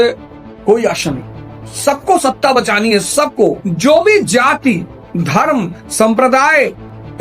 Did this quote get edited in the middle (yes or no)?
yes